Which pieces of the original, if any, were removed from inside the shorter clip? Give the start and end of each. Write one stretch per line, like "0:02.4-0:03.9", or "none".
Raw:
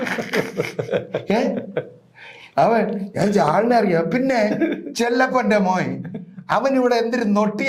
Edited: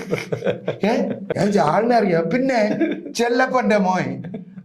0:01.7-0:03.1